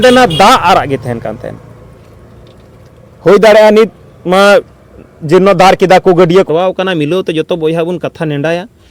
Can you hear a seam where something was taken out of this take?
yes; 1 cut; at 6.5 s

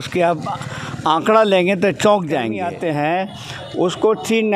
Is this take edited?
yes; 1 cut; at 2.6 s

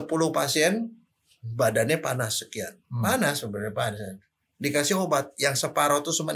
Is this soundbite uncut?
yes; 0 cuts

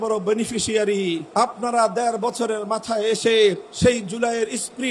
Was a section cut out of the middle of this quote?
yes; 2 cuts; at 1.2 s, 3.7 s

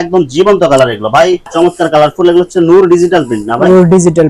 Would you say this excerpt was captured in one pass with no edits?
no; 1 cut; at 1.5 s

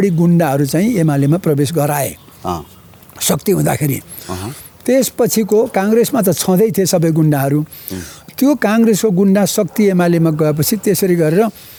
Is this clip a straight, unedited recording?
yes; 0 cuts

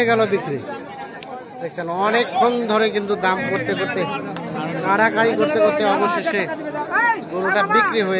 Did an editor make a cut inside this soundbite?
no; 0 cuts

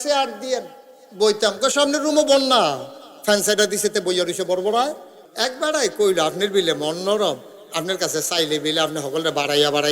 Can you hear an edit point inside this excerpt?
yes; 1 cut; at 5.1 s

